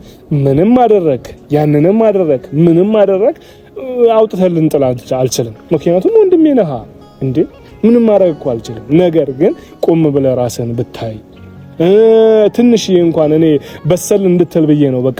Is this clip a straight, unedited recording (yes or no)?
yes